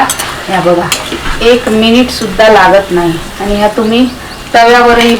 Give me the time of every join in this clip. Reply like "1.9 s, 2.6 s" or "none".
1.2 s, 3.3 s